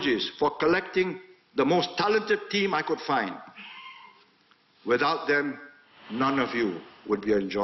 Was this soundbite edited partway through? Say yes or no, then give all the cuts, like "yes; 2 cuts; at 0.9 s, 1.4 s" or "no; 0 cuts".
no; 0 cuts